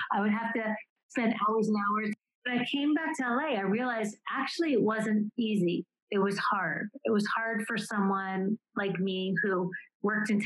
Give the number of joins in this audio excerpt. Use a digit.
2